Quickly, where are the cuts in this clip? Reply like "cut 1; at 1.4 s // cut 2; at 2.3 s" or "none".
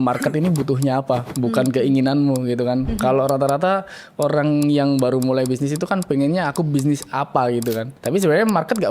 cut 1; at 7.9 s

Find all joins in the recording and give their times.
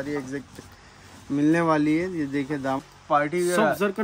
cut 1; at 2.8 s

